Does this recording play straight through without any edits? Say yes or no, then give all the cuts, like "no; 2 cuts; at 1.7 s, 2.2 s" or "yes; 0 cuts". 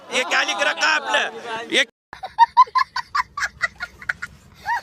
yes; 0 cuts